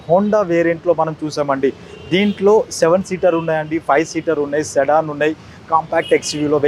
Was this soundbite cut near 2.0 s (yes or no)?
no